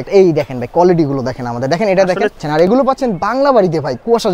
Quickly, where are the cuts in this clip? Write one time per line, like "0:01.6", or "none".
0:02.4

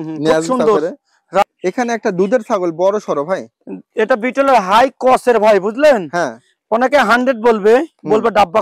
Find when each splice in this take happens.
0:01.4

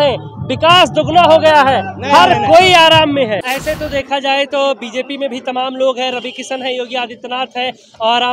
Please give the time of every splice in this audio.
0:03.4

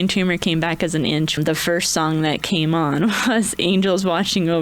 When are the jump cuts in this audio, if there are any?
0:01.4

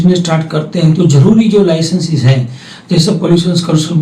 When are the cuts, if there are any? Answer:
none

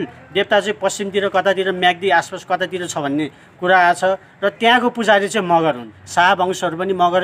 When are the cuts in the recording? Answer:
0:06.0

